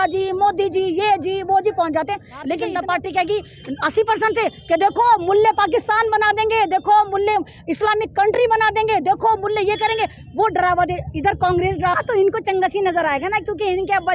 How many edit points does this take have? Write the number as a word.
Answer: two